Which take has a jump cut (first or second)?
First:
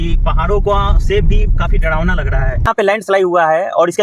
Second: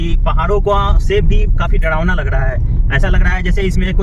first